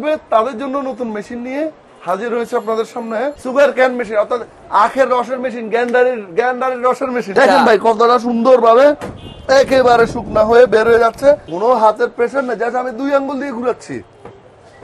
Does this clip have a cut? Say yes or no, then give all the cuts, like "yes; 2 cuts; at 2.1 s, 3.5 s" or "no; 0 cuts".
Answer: yes; 3 cuts; at 3.4 s, 7.4 s, 11.5 s